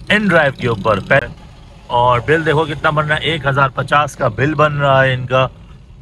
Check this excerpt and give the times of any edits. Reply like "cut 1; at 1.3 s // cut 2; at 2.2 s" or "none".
cut 1; at 1.2 s